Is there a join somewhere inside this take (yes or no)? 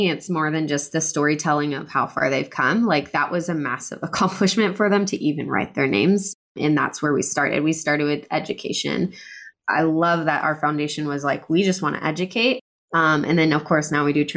yes